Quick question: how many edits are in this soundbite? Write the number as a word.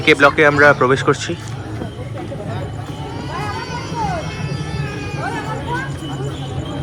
zero